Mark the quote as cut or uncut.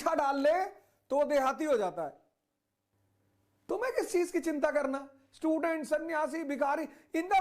cut